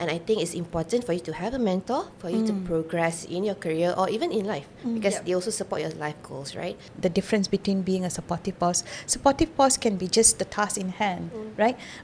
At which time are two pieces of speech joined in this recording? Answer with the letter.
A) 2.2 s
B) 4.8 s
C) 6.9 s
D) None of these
C